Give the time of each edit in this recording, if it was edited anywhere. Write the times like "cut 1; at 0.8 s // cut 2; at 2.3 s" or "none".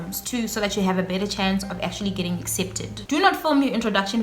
cut 1; at 2.9 s